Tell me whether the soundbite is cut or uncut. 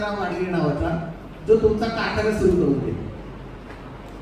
uncut